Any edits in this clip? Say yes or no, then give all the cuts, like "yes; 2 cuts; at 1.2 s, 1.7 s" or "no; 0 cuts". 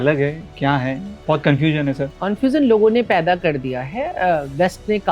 yes; 2 cuts; at 1.1 s, 2.1 s